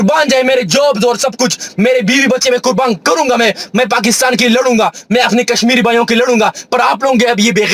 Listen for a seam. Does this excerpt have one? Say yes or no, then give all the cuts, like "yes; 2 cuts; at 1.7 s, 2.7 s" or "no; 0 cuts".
no; 0 cuts